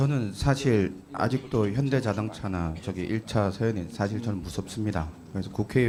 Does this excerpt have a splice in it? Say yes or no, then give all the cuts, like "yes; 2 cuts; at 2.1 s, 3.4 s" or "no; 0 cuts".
no; 0 cuts